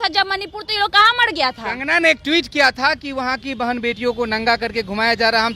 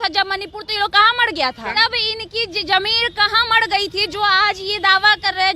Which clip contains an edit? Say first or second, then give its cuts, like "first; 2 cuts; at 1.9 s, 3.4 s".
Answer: second; 1 cut; at 1.7 s